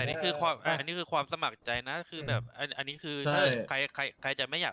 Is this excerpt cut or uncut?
uncut